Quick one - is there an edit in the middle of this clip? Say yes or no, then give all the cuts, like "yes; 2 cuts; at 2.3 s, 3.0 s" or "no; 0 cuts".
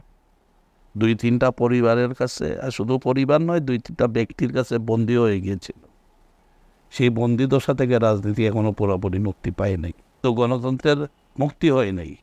yes; 1 cut; at 10.2 s